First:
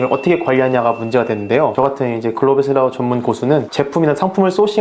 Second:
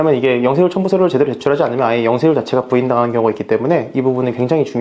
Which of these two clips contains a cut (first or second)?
first